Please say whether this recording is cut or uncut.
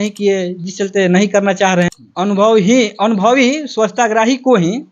cut